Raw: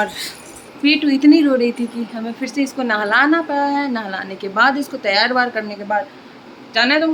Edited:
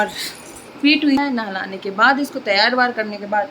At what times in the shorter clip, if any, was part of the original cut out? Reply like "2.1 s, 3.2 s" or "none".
1.2 s